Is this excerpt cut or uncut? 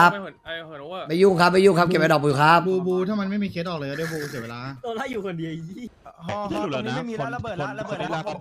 cut